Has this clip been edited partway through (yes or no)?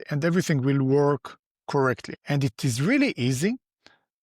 yes